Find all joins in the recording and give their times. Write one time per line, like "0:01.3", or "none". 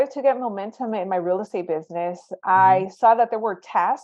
none